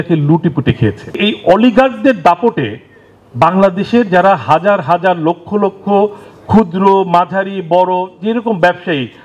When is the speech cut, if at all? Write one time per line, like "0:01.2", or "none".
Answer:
0:01.2